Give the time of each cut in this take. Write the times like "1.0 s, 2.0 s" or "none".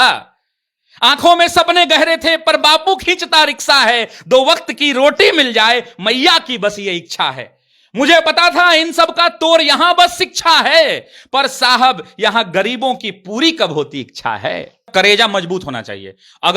14.9 s